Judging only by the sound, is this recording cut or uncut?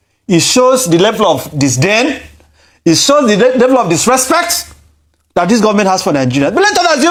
uncut